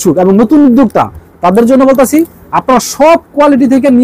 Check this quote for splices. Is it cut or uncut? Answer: uncut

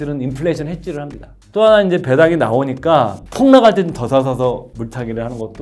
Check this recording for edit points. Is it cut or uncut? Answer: cut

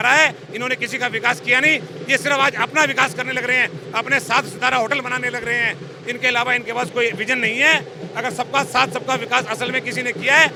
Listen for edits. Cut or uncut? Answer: uncut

